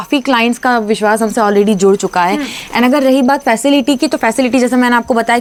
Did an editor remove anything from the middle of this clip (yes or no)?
no